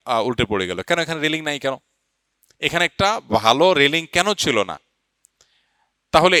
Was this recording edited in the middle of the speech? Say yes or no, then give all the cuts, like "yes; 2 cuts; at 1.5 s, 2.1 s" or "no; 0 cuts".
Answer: no; 0 cuts